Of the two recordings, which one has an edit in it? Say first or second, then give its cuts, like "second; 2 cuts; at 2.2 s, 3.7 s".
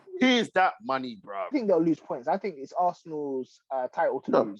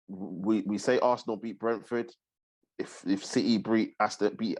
first; 1 cut; at 1.3 s